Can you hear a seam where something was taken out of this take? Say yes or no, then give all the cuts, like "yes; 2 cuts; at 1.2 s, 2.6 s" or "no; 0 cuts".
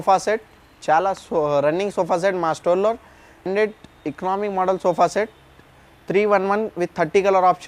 no; 0 cuts